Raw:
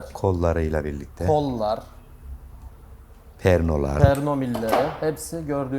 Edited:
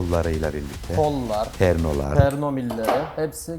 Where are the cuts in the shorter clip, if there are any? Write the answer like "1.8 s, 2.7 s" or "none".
1.5 s